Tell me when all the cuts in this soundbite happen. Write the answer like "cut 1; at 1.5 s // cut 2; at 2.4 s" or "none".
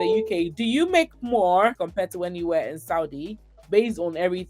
cut 1; at 1.8 s